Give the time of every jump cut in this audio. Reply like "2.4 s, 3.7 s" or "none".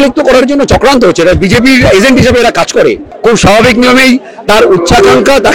3.1 s